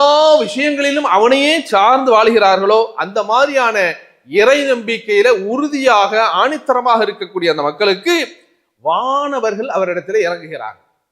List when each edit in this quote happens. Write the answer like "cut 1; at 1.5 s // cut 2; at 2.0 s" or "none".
none